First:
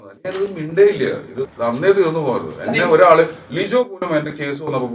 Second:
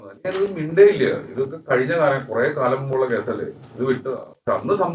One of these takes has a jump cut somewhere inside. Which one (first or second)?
first